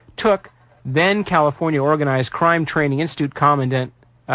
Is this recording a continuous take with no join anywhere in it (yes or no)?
yes